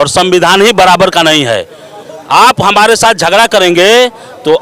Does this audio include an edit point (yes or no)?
no